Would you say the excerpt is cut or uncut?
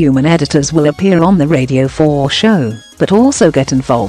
uncut